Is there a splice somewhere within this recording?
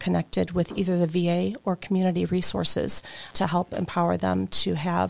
yes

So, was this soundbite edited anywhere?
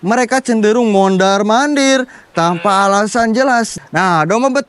yes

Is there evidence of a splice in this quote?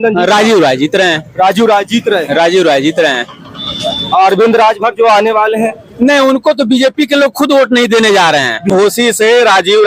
yes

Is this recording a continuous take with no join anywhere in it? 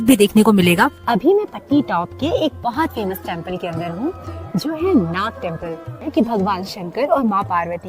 no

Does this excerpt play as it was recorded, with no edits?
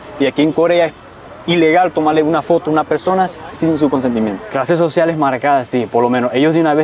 no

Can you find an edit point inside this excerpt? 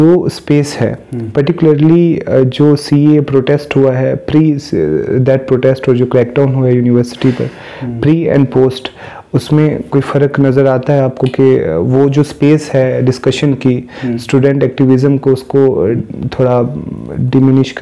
no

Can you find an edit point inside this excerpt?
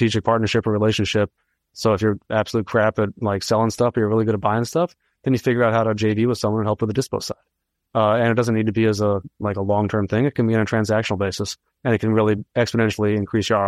yes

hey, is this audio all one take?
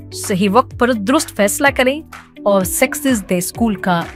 yes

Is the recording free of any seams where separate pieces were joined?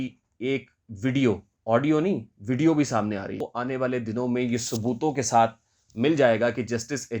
no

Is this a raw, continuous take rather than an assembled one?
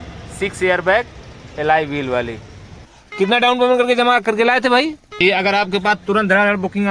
no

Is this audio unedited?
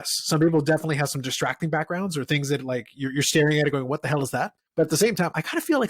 no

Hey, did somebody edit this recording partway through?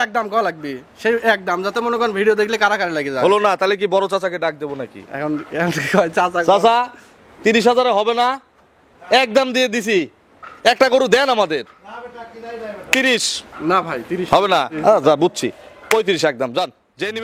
no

